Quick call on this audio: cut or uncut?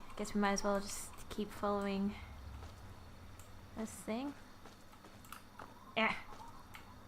cut